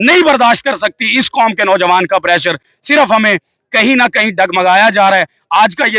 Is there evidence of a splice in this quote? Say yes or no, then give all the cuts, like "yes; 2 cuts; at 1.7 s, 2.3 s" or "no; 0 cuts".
no; 0 cuts